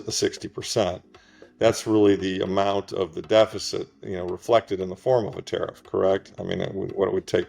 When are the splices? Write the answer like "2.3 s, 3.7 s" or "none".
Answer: none